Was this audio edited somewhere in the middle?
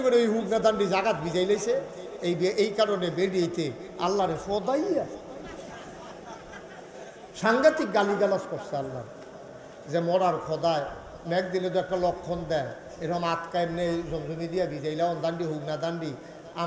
no; 0 cuts

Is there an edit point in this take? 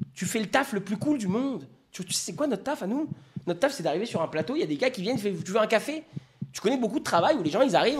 no; 0 cuts

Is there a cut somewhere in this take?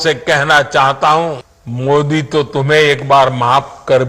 no; 0 cuts

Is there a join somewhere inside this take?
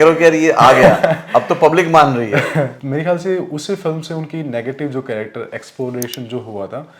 yes; 1 cut; at 2.8 s

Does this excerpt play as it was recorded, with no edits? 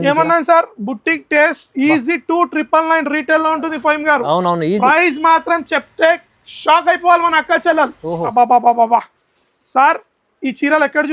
no; 1 cut; at 8.3 s

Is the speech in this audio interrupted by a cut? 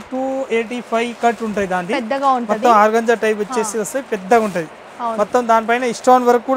no; 0 cuts

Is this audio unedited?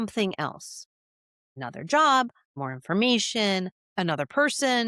no; 3 cuts; at 1.6 s, 2.5 s, 3.8 s

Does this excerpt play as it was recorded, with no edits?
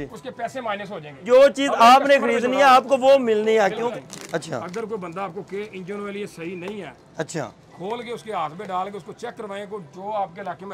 no; 2 cuts; at 1.1 s, 3.9 s

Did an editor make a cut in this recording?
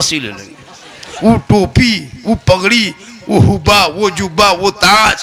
yes; 1 cut; at 1.3 s

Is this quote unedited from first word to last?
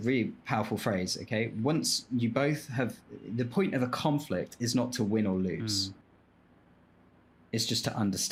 yes; 0 cuts

